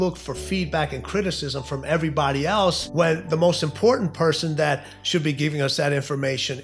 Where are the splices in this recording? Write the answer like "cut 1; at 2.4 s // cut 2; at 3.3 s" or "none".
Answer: cut 1; at 2.8 s